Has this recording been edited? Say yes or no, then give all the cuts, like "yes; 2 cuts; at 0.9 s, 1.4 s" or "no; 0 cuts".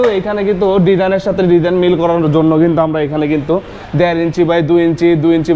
no; 0 cuts